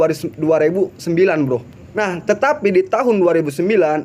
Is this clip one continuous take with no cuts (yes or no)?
no